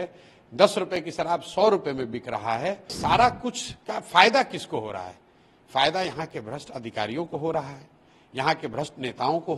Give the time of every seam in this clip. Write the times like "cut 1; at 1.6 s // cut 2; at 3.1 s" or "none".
cut 1; at 2.9 s